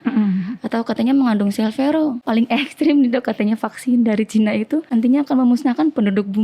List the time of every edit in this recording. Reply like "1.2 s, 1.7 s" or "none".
2.2 s, 4.9 s